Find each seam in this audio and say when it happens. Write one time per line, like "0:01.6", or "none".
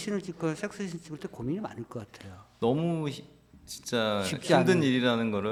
none